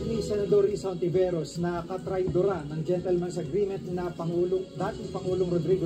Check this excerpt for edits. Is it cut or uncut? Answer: uncut